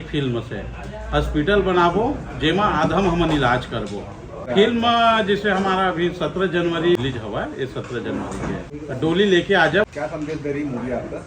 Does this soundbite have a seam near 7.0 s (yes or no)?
yes